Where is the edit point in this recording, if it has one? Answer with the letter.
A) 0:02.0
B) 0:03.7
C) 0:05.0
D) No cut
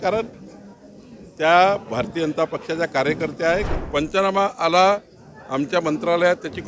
B